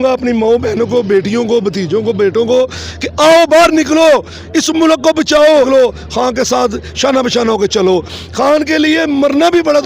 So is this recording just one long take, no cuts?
no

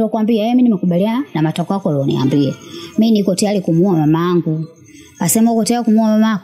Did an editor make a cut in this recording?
no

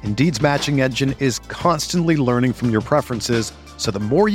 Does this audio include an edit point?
no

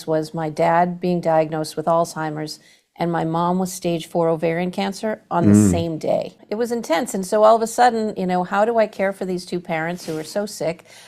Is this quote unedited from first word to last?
no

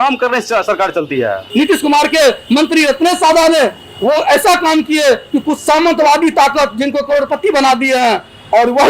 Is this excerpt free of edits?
no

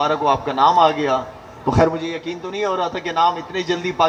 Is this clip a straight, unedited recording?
yes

